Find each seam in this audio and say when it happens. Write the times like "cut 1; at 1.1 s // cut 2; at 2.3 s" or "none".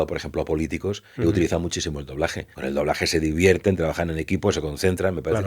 cut 1; at 2.5 s